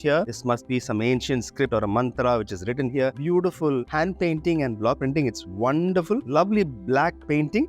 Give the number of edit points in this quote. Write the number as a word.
two